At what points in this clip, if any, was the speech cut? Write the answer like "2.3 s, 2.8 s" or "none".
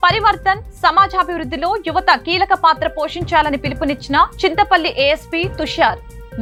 none